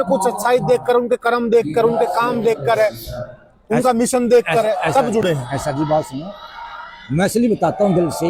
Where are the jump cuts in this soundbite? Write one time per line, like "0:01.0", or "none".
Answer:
none